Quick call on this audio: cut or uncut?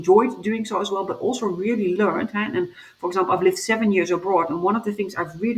uncut